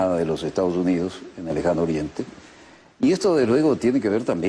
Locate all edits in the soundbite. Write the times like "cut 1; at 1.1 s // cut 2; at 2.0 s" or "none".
cut 1; at 3.5 s